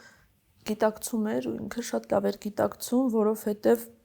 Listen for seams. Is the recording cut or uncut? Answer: uncut